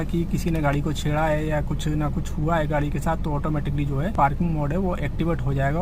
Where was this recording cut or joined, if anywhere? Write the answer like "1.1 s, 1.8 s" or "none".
4.1 s